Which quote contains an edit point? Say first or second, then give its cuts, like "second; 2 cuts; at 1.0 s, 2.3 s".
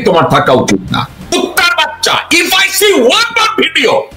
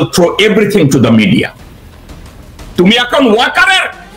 first; 1 cut; at 1.3 s